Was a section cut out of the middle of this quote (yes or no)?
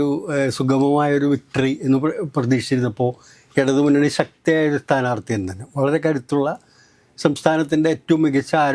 no